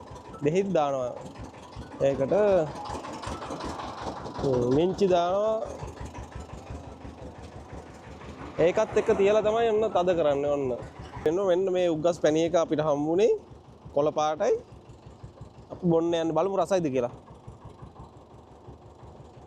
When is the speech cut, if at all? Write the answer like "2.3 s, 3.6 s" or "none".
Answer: 11.3 s